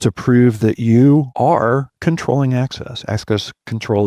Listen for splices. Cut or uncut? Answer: cut